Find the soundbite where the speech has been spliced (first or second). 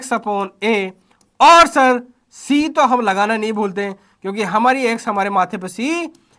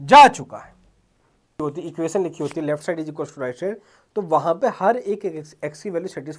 second